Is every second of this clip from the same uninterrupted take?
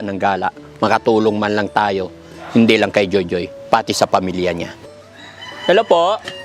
no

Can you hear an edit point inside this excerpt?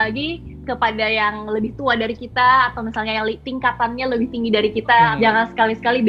yes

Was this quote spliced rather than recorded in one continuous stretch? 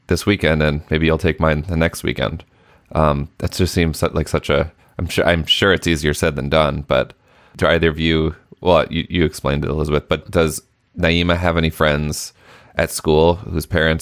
yes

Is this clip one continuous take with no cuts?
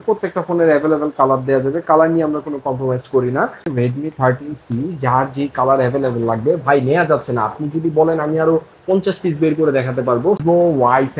no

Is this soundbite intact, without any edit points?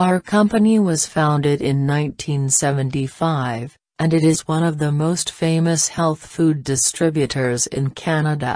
no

